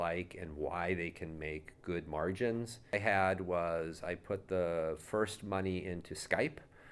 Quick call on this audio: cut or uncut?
cut